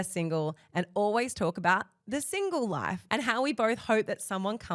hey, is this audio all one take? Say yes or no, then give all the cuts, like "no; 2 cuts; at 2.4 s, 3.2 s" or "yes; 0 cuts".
no; 1 cut; at 3.0 s